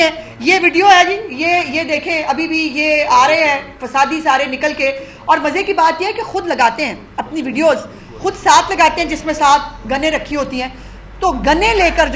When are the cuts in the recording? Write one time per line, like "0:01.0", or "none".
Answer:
none